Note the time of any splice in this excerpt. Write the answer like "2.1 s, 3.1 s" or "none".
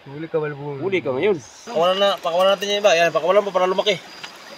1.6 s